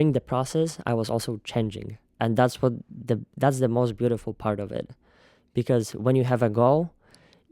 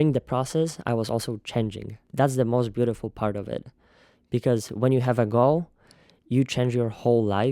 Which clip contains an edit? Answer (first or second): second